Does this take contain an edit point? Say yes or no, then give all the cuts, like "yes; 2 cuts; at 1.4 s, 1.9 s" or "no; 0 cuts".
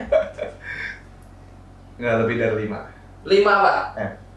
no; 0 cuts